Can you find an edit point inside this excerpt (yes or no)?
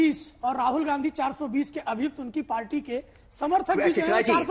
no